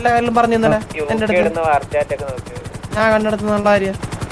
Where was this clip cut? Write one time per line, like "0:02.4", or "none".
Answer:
none